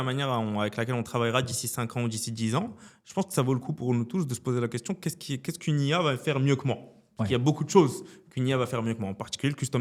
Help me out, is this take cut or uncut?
uncut